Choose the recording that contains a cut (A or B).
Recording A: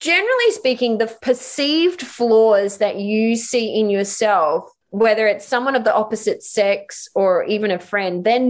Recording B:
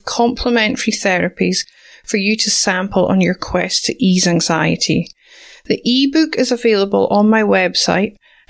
A